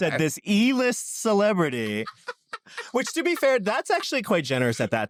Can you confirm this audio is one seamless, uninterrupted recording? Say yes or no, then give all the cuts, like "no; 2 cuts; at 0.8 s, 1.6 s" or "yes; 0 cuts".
yes; 0 cuts